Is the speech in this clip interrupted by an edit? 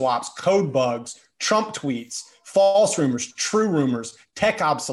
no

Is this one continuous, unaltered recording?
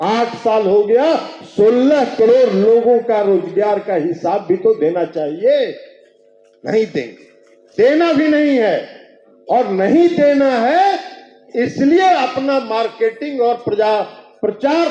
yes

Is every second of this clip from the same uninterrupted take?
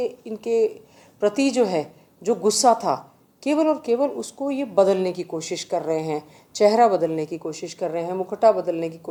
yes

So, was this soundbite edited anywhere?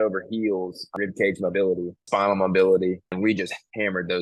yes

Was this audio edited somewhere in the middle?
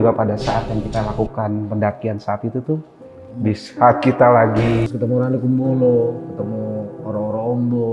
yes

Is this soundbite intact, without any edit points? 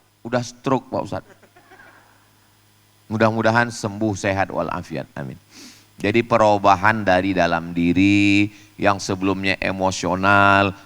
yes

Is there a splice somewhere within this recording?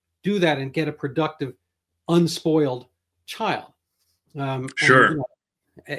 no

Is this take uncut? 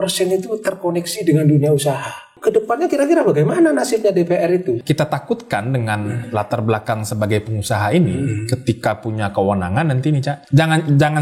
no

